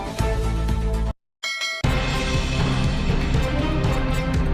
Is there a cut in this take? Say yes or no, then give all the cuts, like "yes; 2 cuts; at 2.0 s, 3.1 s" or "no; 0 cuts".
yes; 1 cut; at 1.2 s